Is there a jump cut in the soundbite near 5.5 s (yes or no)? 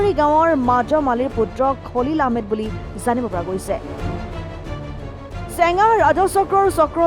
yes